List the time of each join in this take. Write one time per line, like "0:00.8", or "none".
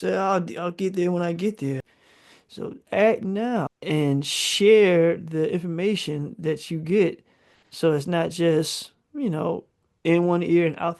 0:01.9
0:03.7